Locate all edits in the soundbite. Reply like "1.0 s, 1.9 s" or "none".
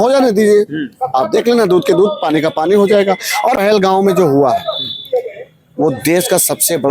3.6 s